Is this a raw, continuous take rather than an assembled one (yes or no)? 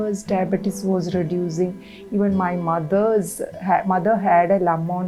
yes